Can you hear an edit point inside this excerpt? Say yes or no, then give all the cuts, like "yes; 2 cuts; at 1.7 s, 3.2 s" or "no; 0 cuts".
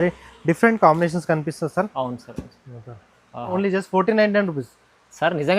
yes; 1 cut; at 3.5 s